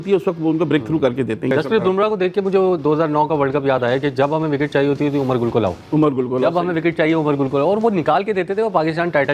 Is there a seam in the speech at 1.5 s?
yes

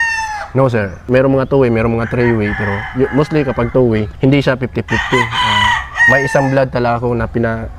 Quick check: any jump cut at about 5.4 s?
no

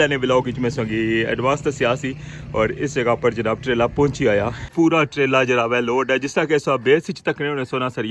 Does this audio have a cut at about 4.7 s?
yes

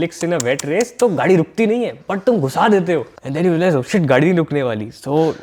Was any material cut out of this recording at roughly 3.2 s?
yes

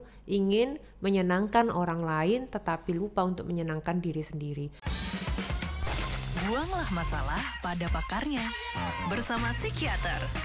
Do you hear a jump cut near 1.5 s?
no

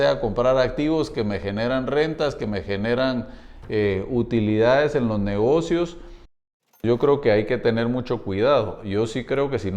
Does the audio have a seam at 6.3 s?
yes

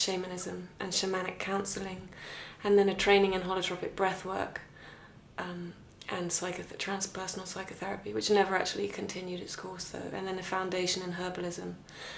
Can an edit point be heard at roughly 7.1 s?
yes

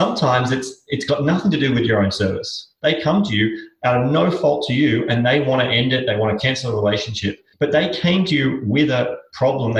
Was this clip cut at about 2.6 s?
yes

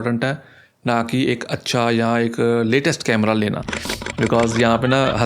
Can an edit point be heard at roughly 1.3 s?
no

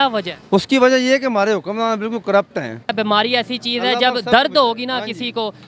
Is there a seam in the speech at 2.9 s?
yes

